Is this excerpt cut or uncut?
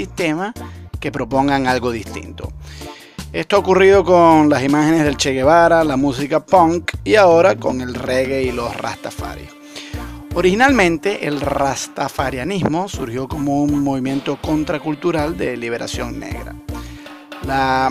uncut